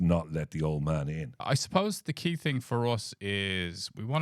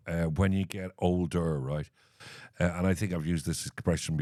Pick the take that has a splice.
first; 1 cut; at 1.3 s

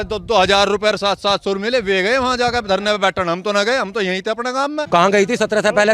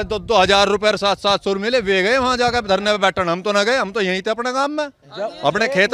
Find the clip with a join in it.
first; 1 cut; at 4.8 s

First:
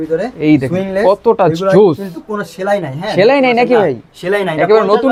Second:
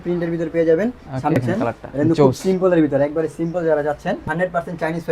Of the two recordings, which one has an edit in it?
second; 2 cuts; at 1.4 s, 4.2 s

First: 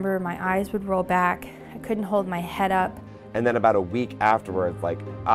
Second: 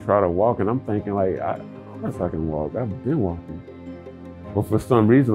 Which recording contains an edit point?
first; 1 cut; at 3.0 s

